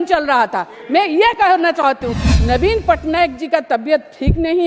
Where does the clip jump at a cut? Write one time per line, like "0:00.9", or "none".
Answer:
0:02.1

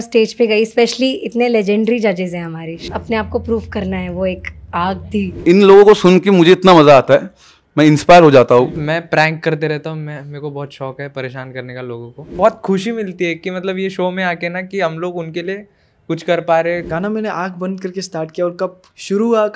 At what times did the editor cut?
0:02.7
0:05.4
0:08.8
0:12.3
0:16.9

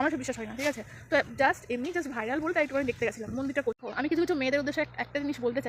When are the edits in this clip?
0:03.7

